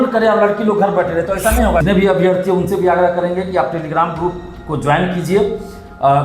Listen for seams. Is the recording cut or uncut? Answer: cut